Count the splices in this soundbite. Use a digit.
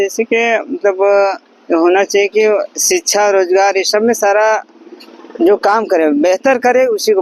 0